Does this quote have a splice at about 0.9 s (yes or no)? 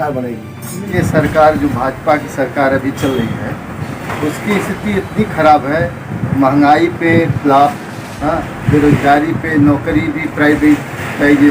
yes